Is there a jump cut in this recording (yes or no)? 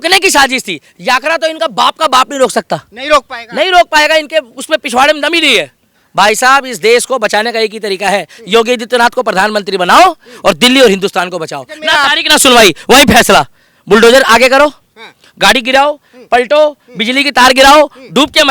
yes